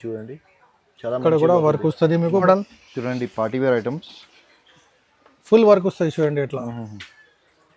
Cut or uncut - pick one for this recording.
cut